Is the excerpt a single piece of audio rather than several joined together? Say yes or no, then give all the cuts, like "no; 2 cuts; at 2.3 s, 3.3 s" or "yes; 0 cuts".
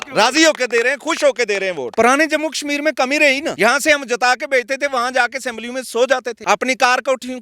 no; 3 cuts; at 1.8 s, 3.5 s, 6.3 s